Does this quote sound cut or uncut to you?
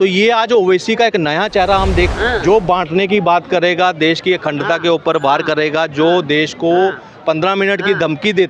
cut